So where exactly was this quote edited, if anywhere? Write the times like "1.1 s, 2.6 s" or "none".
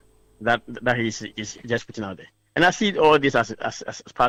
none